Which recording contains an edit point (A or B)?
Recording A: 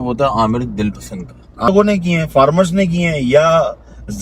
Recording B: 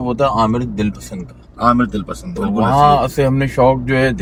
A